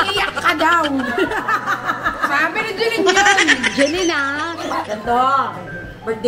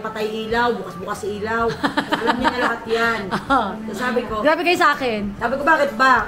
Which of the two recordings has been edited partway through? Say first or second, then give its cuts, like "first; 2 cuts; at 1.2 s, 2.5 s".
first; 1 cut; at 4.9 s